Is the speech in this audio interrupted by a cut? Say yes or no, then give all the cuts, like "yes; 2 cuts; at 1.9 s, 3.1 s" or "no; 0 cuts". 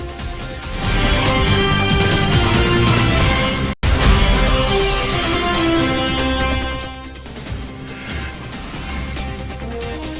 yes; 2 cuts; at 7.8 s, 9.2 s